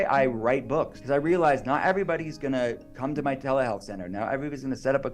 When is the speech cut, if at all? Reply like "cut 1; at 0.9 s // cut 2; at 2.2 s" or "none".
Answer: cut 1; at 1.0 s // cut 2; at 2.9 s